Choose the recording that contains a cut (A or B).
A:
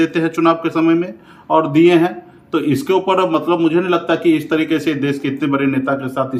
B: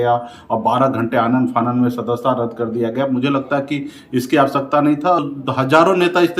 B